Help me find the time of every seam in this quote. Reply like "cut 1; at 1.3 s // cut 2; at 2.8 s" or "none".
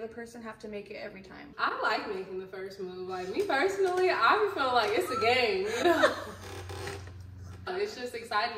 cut 1; at 1.5 s

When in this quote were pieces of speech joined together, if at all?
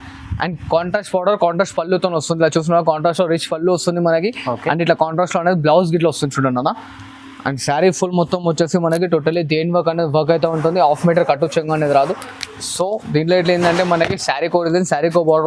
none

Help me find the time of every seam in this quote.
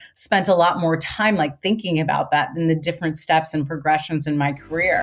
none

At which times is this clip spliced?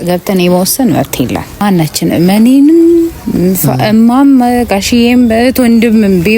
cut 1; at 1.6 s

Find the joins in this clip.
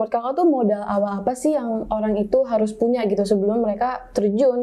none

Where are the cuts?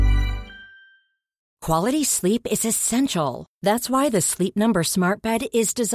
cut 1; at 1.5 s

